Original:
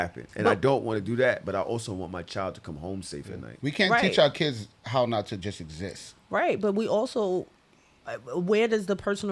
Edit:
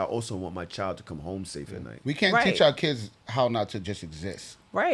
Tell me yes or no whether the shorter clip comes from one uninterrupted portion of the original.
yes